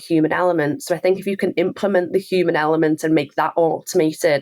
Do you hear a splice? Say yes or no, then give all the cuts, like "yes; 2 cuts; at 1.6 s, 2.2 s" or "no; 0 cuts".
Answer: no; 0 cuts